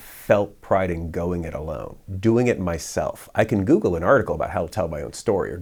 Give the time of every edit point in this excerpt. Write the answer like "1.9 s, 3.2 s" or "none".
none